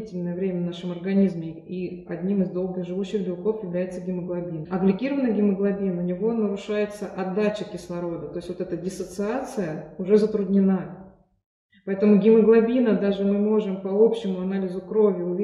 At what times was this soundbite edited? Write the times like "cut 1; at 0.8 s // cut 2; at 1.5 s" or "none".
cut 1; at 4.6 s